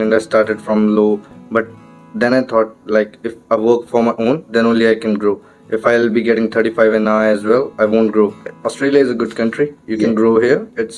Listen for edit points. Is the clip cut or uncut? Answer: cut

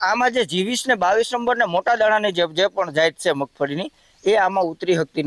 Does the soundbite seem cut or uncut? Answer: uncut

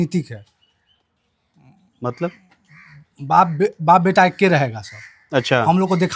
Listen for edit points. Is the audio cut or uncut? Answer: uncut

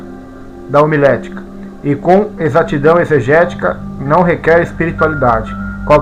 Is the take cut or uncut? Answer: uncut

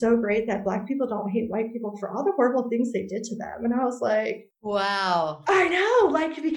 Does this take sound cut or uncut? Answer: cut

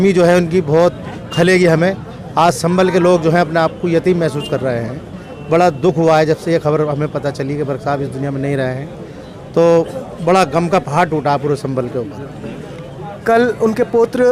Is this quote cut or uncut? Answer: uncut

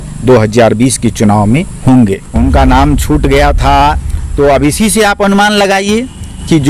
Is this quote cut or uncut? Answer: cut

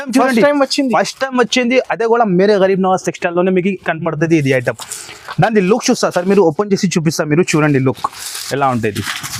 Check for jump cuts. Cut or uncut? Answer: uncut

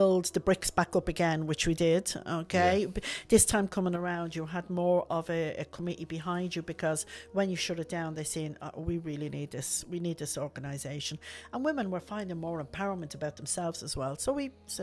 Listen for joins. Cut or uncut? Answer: uncut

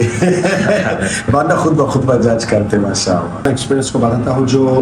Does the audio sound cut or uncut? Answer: cut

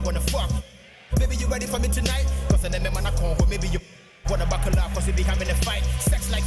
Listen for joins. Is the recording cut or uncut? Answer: cut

